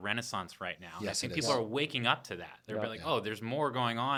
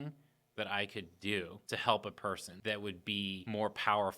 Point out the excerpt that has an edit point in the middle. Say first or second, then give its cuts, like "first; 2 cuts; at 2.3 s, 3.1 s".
second; 3 cuts; at 1.6 s, 2.5 s, 3.4 s